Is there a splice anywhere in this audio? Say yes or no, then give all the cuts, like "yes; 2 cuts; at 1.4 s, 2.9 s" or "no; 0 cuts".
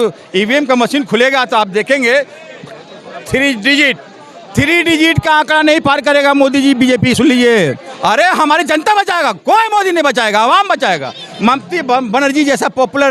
yes; 2 cuts; at 7.9 s, 11.3 s